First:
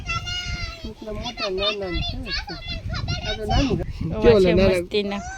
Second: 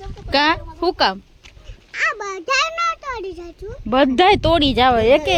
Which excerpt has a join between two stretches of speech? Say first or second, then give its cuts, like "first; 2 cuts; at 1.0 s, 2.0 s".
first; 1 cut; at 3.9 s